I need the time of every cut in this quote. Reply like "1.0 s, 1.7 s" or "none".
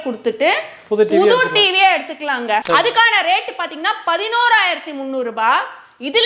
2.6 s